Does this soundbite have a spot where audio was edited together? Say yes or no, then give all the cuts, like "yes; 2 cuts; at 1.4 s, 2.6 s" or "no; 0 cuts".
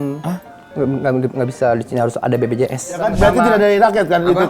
yes; 1 cut; at 3.1 s